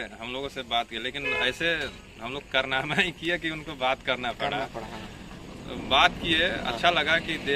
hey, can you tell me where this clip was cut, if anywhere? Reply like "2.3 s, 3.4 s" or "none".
none